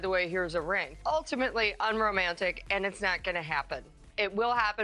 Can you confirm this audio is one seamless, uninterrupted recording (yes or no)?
no